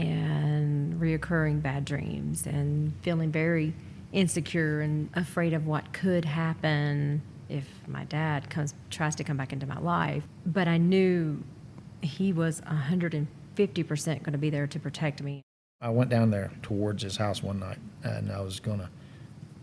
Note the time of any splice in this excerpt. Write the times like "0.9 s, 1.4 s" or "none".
5.1 s, 10.3 s, 15.9 s

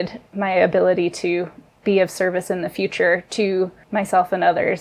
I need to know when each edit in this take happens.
3.8 s

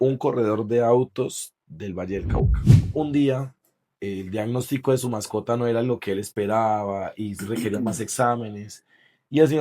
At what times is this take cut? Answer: 2.9 s

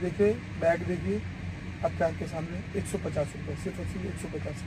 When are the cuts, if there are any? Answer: none

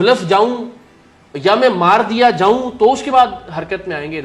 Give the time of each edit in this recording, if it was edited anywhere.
none

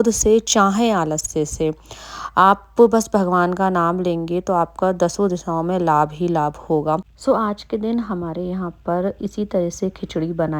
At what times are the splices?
7.1 s

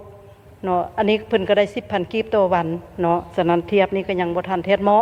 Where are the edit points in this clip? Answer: none

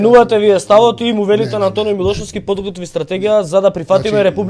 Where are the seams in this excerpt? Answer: none

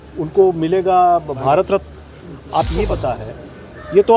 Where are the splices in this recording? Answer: 3.0 s

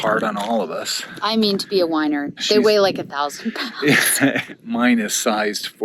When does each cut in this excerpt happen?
2.4 s, 4.4 s

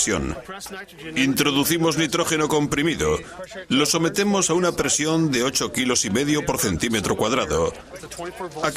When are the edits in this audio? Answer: 7.4 s

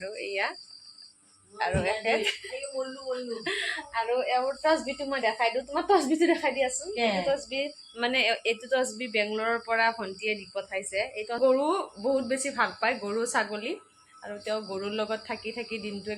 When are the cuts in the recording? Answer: 11.4 s

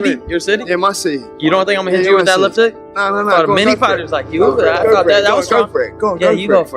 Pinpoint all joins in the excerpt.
5.4 s

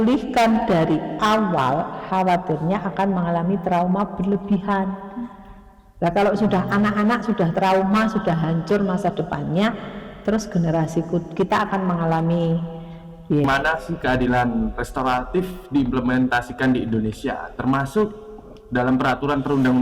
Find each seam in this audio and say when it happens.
13.5 s

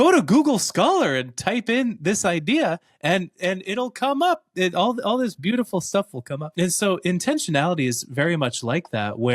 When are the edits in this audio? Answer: 6.5 s

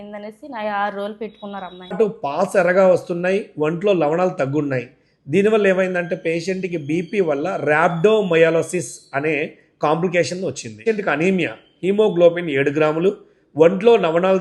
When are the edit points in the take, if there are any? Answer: 2.0 s, 10.8 s

